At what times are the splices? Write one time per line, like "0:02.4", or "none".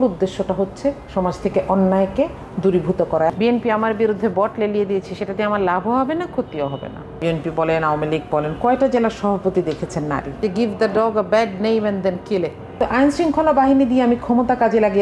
0:03.3
0:07.2
0:10.4
0:12.8